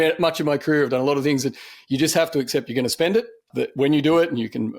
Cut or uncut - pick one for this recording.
cut